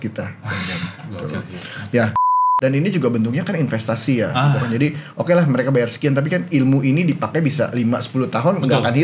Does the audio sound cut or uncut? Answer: cut